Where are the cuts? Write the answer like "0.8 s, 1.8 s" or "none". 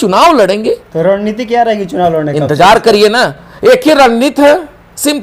none